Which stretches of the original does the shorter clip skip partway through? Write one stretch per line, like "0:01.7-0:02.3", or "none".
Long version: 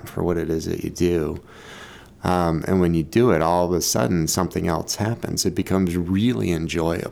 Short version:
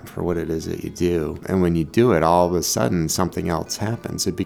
0:01.4-0:02.6